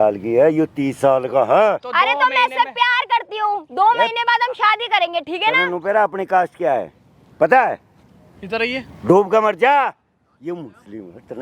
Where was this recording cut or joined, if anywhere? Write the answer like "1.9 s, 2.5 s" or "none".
none